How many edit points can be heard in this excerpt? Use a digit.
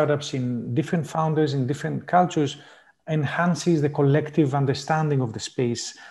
0